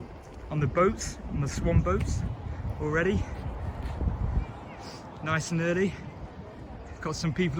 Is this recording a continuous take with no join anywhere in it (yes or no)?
yes